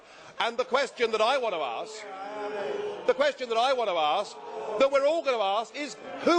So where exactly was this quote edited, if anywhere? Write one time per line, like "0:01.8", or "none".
0:03.9